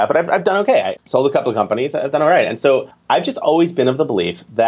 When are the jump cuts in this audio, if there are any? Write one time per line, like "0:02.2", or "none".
0:01.0
0:02.9